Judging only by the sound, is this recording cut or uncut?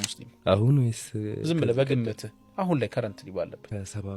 uncut